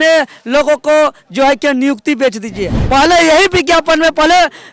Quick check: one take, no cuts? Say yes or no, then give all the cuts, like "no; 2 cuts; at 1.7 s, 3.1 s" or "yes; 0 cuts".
no; 1 cut; at 2.7 s